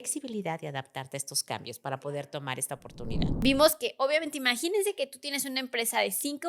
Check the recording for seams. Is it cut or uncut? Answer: cut